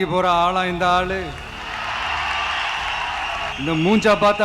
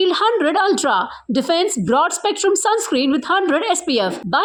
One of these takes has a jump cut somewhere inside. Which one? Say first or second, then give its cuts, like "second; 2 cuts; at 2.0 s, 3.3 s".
first; 1 cut; at 3.5 s